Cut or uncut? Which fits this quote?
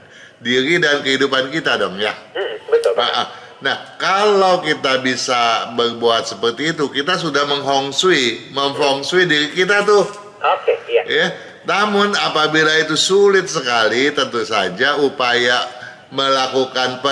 uncut